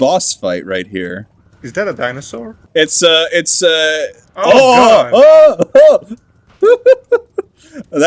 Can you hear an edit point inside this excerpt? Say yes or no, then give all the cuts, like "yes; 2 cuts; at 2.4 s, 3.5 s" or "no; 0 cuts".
yes; 1 cut; at 2.6 s